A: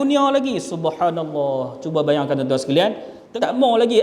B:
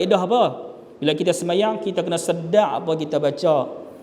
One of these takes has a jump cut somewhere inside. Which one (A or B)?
A